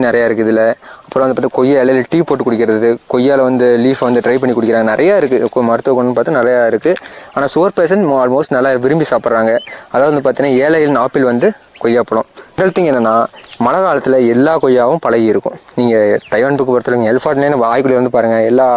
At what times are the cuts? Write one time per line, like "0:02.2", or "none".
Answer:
0:12.6